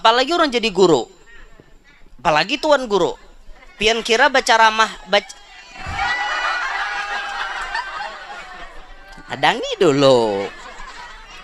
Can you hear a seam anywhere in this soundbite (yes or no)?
no